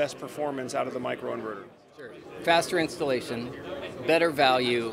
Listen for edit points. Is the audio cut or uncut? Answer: cut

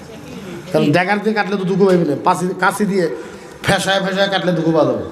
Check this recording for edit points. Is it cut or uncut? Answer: uncut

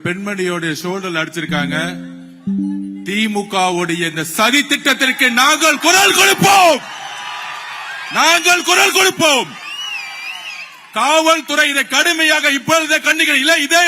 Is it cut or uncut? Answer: uncut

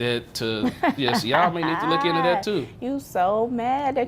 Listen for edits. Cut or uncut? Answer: uncut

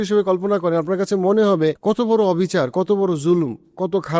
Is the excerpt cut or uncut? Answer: cut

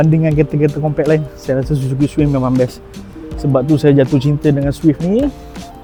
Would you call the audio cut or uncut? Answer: uncut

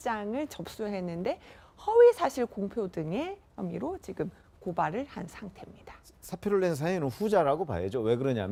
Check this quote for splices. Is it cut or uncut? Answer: uncut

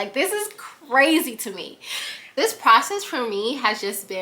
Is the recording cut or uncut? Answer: cut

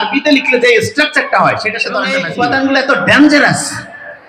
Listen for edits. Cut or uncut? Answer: cut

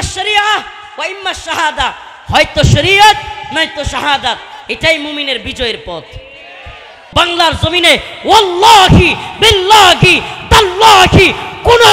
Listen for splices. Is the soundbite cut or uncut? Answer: cut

